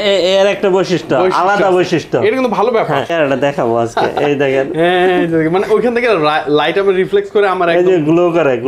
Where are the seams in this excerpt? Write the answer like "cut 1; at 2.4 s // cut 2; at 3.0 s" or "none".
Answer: cut 1; at 3.1 s